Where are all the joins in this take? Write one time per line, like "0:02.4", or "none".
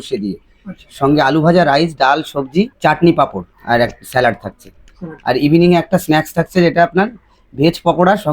0:02.7
0:03.5